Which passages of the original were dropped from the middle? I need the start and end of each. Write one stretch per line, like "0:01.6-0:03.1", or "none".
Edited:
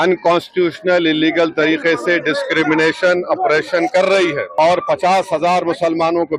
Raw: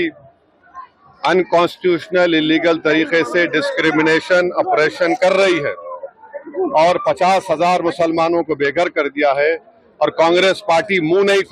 0:05.8-0:06.7